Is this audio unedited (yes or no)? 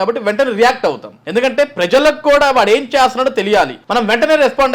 no